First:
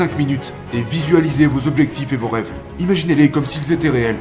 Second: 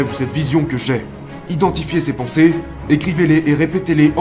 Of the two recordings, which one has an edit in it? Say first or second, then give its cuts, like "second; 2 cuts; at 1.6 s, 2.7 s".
second; 1 cut; at 1.3 s